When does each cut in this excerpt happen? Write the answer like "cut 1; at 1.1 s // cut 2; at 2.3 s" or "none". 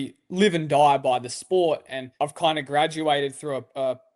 cut 1; at 2.0 s